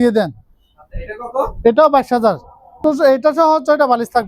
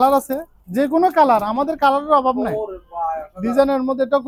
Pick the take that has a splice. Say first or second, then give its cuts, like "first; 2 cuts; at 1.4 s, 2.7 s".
first; 1 cut; at 2.8 s